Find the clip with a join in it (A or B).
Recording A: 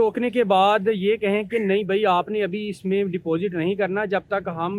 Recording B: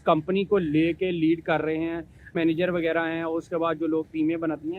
B